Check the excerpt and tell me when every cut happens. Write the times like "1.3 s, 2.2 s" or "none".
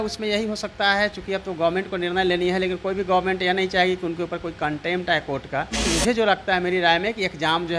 5.9 s